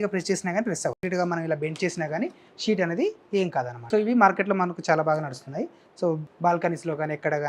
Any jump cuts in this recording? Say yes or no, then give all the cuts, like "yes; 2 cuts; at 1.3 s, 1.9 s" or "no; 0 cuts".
yes; 3 cuts; at 1.0 s, 3.8 s, 6.3 s